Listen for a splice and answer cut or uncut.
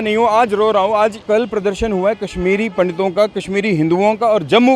cut